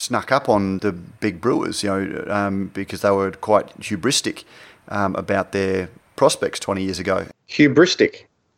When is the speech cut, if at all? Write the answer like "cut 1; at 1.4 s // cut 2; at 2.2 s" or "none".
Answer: cut 1; at 7.4 s

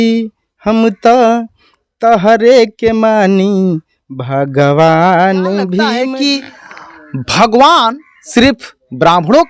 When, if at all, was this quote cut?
cut 1; at 6.0 s

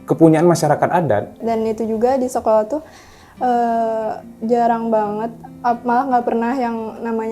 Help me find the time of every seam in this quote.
cut 1; at 1.4 s

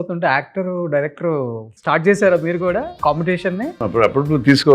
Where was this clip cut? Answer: cut 1; at 1.7 s // cut 2; at 2.9 s // cut 3; at 3.8 s

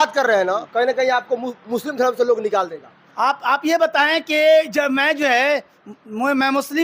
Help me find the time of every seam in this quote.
none

